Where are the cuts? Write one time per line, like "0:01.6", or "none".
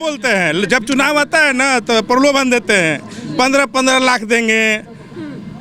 none